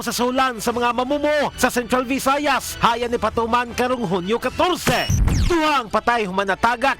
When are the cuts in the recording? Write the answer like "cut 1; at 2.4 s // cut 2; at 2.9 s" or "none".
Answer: cut 1; at 5.1 s